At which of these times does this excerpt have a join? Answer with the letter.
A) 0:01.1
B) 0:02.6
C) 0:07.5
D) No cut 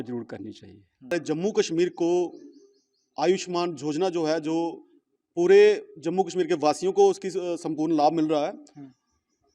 A